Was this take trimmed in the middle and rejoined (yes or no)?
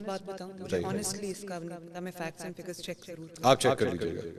no